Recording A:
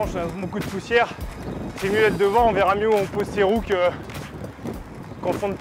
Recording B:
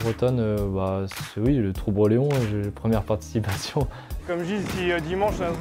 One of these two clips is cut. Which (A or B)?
B